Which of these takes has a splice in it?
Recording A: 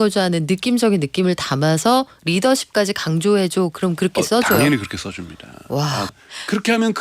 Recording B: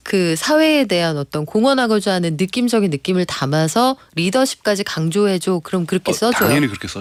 A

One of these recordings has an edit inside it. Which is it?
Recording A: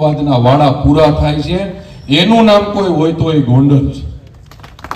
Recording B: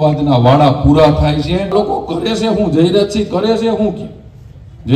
B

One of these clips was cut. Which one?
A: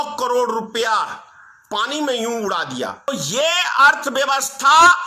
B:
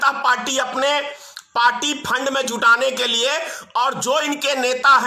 A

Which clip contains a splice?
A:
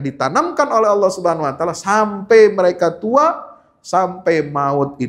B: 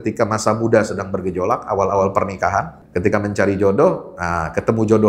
B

